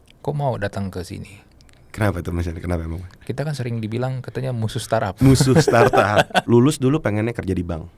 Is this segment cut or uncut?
cut